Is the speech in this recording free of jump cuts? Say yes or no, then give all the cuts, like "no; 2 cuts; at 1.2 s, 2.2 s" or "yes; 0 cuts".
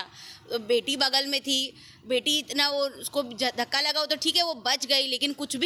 yes; 0 cuts